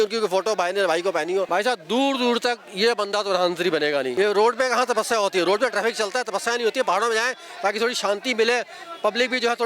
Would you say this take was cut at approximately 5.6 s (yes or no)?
no